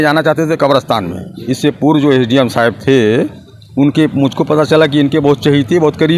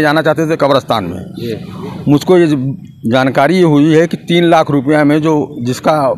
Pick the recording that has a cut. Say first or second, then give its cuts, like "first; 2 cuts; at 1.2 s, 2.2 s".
first; 1 cut; at 1.4 s